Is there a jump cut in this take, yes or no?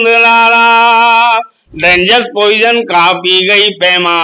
no